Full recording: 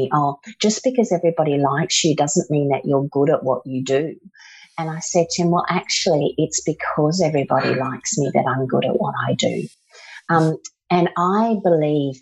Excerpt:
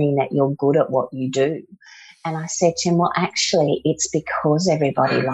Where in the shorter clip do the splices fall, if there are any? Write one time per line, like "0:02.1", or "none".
none